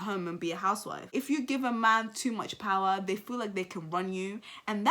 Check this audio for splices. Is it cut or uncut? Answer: cut